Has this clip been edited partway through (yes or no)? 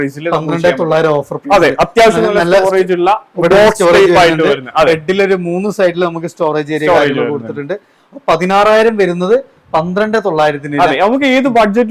no